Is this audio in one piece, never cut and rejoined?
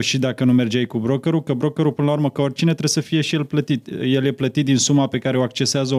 yes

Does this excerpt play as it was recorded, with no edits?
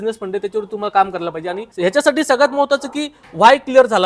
no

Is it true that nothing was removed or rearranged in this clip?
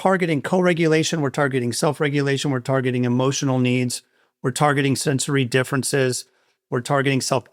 yes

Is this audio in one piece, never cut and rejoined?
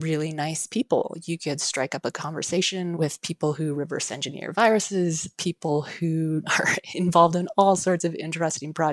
yes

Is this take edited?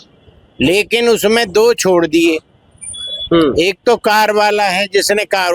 no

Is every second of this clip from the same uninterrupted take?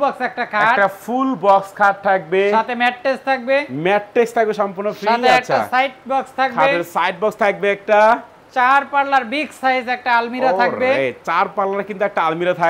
yes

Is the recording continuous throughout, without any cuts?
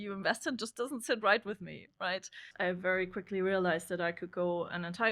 no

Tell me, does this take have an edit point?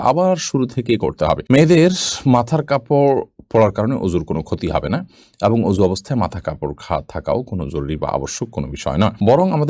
no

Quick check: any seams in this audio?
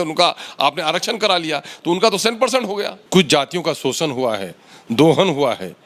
yes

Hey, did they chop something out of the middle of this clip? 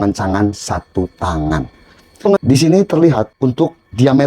yes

